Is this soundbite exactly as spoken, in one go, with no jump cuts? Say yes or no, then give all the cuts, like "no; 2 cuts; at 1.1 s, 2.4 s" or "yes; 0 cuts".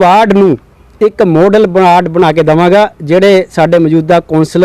yes; 0 cuts